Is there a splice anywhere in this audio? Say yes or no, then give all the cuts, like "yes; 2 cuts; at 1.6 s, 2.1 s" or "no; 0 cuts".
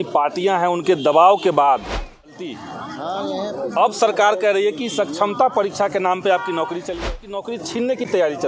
yes; 2 cuts; at 2.5 s, 7.5 s